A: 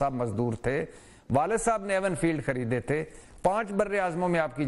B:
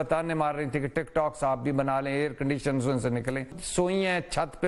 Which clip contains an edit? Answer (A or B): B